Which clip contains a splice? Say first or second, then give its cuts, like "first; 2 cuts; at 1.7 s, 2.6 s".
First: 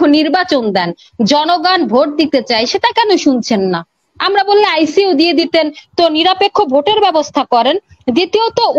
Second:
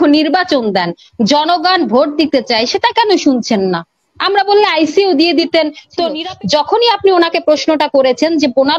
second; 1 cut; at 6.2 s